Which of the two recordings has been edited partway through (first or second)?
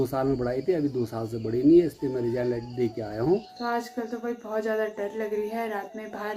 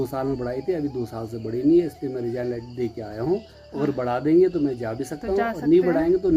first